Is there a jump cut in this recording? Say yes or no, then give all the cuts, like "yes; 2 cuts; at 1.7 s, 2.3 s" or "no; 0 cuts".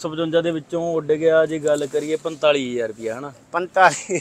no; 0 cuts